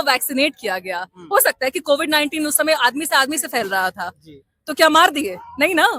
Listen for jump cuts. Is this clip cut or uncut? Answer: uncut